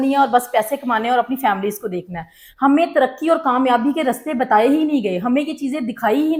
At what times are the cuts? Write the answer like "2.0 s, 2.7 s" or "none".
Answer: none